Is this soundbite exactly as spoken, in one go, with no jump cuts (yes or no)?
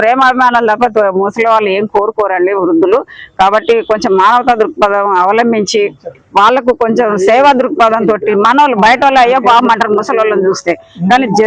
yes